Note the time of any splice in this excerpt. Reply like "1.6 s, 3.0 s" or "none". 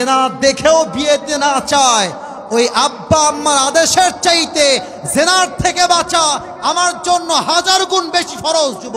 none